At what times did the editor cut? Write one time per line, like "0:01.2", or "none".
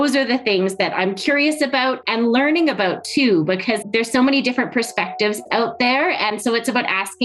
0:02.0
0:03.8
0:06.3